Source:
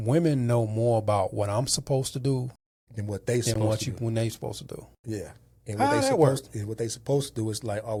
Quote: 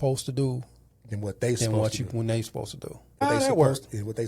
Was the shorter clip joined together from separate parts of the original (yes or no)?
yes